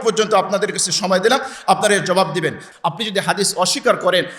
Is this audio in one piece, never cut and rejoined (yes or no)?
no